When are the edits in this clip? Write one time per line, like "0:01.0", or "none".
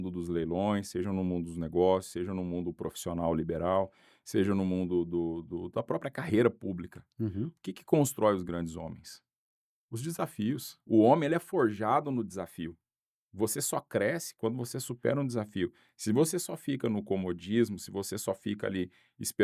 0:10.7